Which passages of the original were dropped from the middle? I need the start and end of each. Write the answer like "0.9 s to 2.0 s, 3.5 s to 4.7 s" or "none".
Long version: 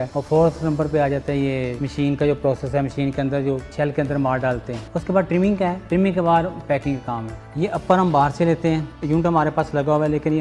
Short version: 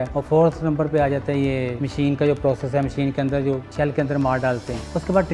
none